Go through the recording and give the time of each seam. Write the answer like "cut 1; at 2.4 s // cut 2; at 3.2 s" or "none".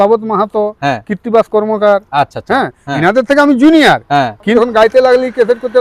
cut 1; at 4.5 s